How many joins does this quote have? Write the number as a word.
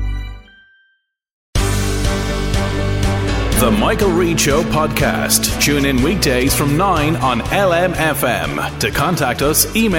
one